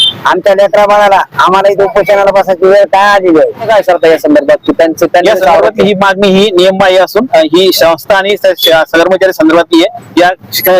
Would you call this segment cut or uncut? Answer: cut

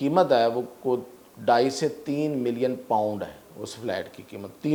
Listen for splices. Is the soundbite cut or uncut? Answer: uncut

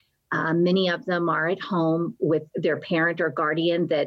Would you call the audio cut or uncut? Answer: cut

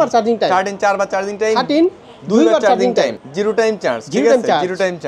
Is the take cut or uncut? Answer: uncut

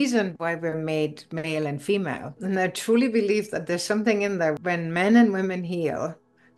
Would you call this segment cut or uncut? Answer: uncut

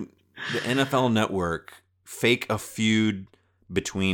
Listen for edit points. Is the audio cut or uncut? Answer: cut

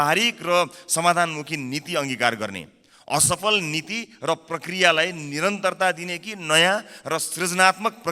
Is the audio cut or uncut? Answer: uncut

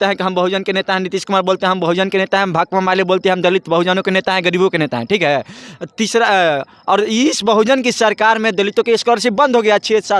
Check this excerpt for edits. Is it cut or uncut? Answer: uncut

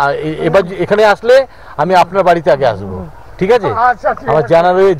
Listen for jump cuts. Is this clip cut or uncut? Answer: uncut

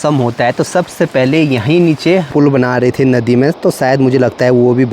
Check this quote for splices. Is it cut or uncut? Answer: cut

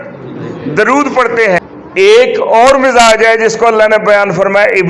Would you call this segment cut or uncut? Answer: cut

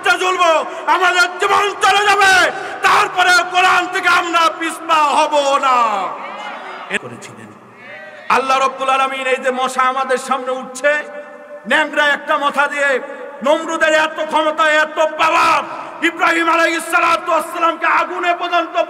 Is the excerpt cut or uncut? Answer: cut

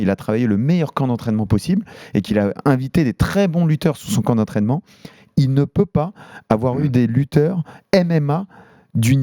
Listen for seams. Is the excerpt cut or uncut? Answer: uncut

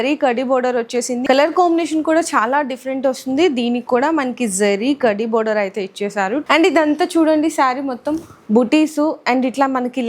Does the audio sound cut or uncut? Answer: cut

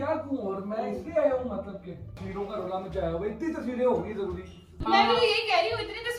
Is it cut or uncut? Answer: cut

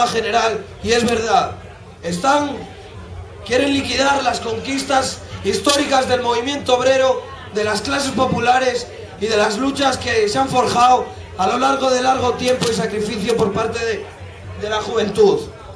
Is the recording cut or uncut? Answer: uncut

